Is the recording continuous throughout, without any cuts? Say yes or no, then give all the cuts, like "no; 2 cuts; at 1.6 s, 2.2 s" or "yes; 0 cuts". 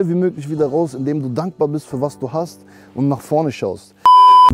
yes; 0 cuts